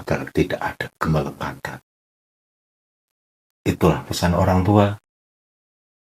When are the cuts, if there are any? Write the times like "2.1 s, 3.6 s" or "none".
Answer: none